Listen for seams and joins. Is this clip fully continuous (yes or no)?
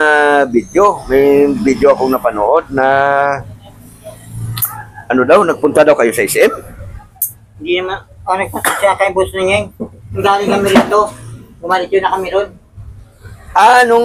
yes